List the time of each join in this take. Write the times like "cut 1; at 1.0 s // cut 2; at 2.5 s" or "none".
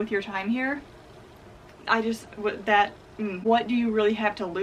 cut 1; at 3.4 s

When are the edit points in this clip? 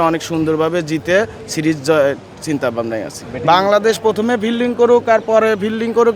none

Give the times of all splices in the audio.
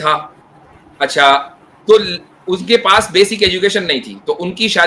none

